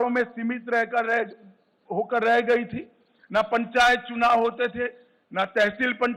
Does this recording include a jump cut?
no; 0 cuts

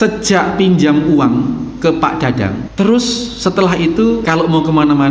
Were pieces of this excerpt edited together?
yes; 2 cuts; at 2.6 s, 4.2 s

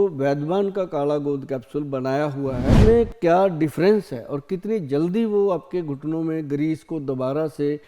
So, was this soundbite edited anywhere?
yes; 1 cut; at 2.7 s

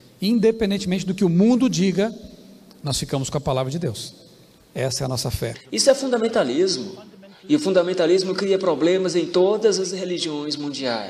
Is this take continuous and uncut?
no; 1 cut; at 5.6 s

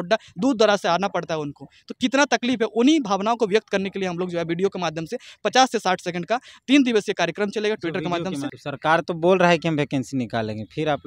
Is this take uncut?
no; 1 cut; at 8.6 s

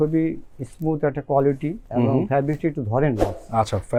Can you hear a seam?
no; 0 cuts

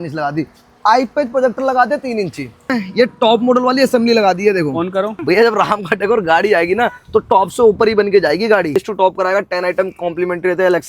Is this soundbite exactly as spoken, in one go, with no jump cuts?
no; 3 cuts; at 2.8 s, 5.2 s, 8.8 s

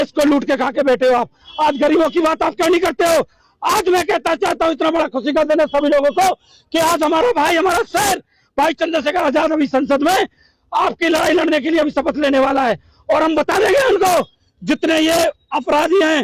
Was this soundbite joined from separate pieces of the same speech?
no; 0 cuts

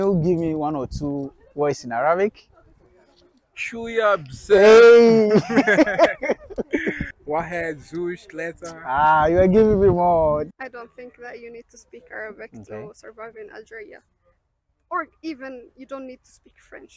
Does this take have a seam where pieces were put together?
yes; 2 cuts; at 7.1 s, 10.5 s

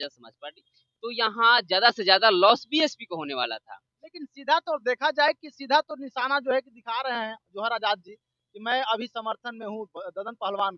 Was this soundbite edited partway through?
no; 0 cuts

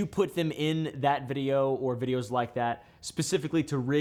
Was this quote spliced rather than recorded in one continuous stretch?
no; 0 cuts

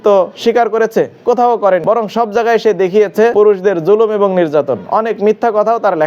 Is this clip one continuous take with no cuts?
no; 2 cuts; at 1.8 s, 3.3 s

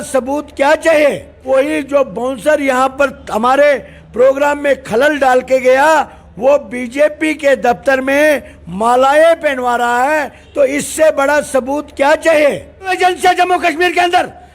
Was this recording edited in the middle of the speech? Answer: yes; 2 cuts; at 1.3 s, 12.9 s

